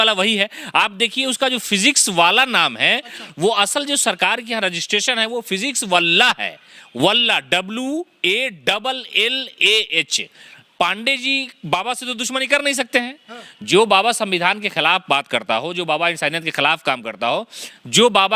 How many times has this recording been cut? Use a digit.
1